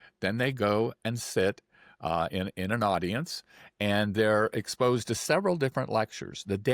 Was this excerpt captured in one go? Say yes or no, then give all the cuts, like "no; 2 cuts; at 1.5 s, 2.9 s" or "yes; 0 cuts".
yes; 0 cuts